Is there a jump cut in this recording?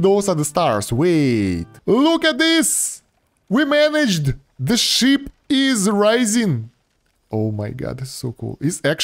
yes; 1 cut; at 1.7 s

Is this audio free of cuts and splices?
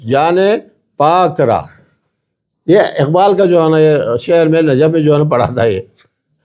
yes; 0 cuts

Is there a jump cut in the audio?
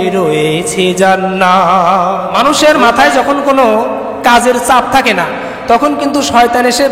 yes; 1 cut; at 2.3 s

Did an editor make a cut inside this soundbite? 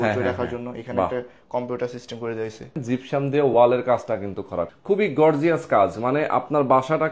yes; 2 cuts; at 2.7 s, 4.8 s

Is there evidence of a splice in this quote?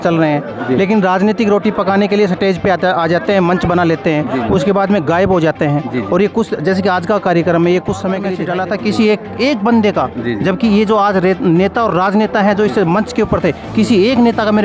yes; 1 cut; at 8.3 s

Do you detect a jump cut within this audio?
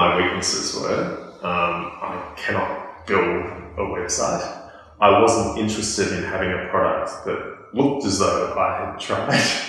no; 0 cuts

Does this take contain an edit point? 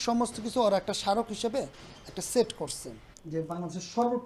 yes; 1 cut; at 2.9 s

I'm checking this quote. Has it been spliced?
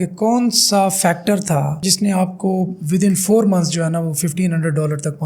no; 0 cuts

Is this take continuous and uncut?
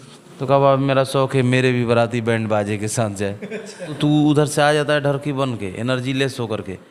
no; 1 cut; at 4.0 s

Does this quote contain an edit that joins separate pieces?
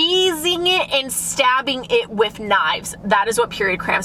no; 0 cuts

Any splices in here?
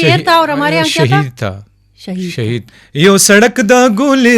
yes; 1 cut; at 2.8 s

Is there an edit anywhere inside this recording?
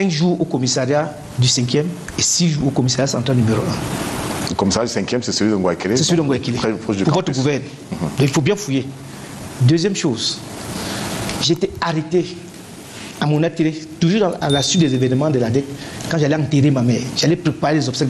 no; 0 cuts

